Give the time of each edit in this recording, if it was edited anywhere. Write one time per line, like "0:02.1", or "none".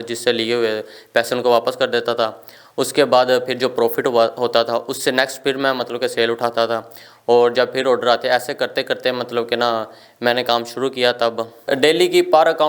0:11.6